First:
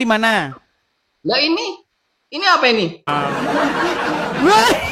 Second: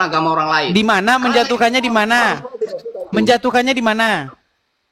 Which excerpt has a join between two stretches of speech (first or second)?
first